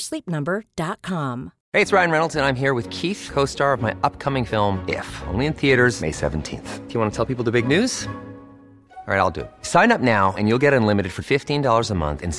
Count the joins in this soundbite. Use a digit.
1